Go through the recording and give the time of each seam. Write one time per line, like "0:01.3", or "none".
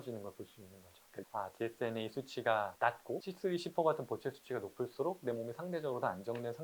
0:01.1